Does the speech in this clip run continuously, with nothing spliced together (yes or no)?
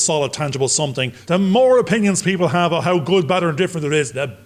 no